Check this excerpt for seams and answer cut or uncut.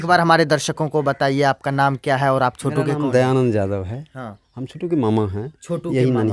uncut